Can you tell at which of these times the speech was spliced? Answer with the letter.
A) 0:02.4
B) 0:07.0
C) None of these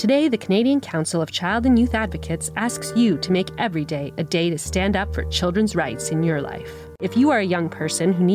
B